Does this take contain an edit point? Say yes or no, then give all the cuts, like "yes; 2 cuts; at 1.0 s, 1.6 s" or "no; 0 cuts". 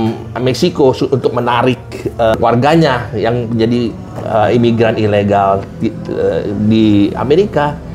no; 0 cuts